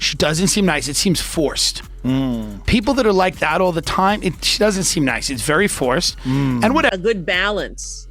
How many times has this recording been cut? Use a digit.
1